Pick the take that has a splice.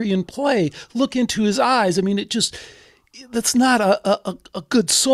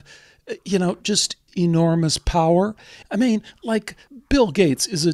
second; 3 cuts; at 1.4 s, 3.0 s, 4.1 s

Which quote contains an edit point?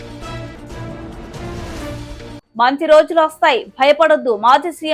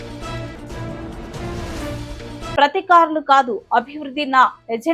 second; 1 cut; at 2.3 s

